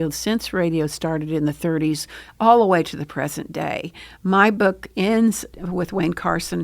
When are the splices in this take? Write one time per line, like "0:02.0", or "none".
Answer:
0:05.5